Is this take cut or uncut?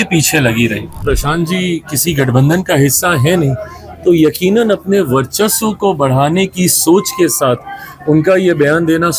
cut